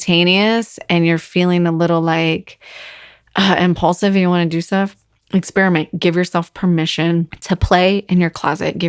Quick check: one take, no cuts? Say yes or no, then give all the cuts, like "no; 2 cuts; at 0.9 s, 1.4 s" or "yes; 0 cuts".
no; 1 cut; at 7.3 s